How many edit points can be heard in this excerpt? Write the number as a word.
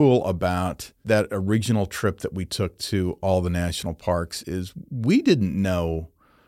one